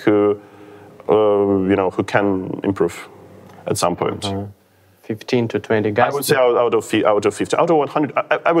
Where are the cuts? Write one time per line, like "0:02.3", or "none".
none